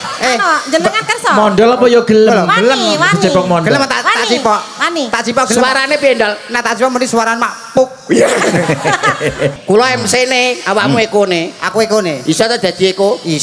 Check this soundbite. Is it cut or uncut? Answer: cut